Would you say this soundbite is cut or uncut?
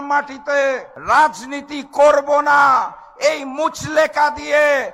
cut